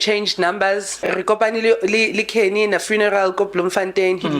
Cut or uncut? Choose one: cut